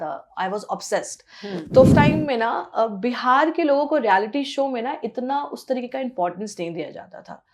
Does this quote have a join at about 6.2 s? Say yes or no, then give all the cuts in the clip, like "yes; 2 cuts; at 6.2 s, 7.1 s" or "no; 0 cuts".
no; 1 cut; at 1.9 s